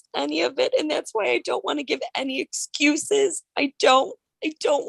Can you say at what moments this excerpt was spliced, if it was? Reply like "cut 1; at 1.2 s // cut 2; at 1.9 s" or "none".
none